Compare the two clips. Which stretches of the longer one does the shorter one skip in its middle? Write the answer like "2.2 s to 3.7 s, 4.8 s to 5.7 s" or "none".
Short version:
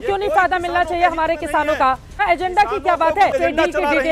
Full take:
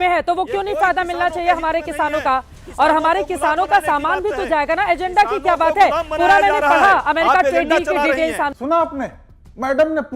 2.6 s to 4.8 s, 5.9 s to 7.5 s